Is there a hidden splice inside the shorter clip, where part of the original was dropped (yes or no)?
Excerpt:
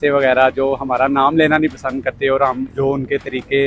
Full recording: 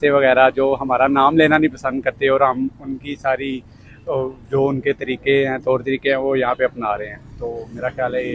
yes